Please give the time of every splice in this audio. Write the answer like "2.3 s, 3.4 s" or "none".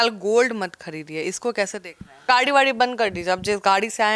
2.2 s